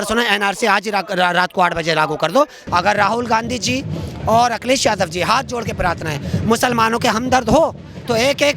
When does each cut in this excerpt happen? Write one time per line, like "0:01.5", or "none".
0:02.6